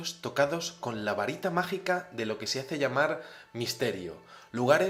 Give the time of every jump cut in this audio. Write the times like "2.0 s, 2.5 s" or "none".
none